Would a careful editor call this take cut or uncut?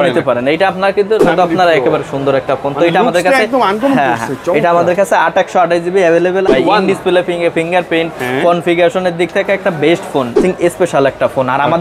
cut